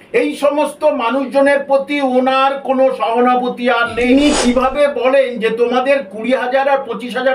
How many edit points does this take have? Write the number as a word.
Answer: one